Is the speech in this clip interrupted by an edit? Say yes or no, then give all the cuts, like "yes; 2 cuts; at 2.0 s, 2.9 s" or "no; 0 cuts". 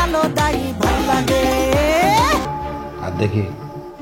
yes; 1 cut; at 2.5 s